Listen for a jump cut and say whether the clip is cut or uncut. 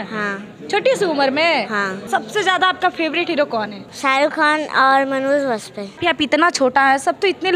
cut